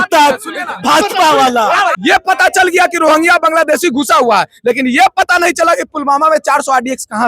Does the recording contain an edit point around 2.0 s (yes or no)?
yes